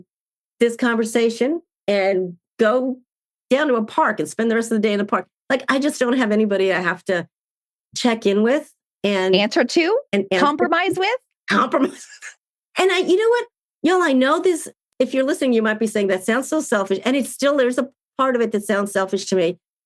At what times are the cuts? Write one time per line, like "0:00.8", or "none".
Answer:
none